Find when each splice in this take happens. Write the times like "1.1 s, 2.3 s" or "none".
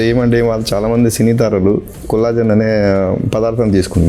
none